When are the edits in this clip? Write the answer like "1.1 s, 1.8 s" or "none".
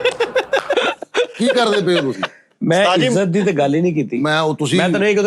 none